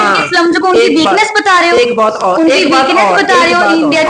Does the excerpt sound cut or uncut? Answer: uncut